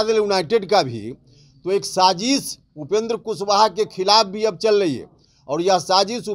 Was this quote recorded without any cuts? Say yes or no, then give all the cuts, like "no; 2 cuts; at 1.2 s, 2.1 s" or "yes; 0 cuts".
yes; 0 cuts